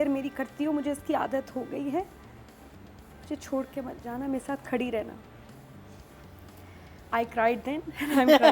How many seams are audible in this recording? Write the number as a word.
zero